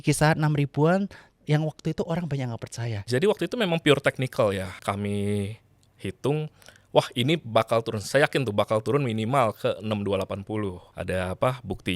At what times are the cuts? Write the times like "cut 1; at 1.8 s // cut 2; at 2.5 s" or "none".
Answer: cut 1; at 3.0 s // cut 2; at 4.8 s // cut 3; at 10.8 s